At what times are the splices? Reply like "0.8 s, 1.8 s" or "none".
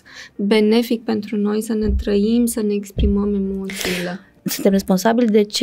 4.3 s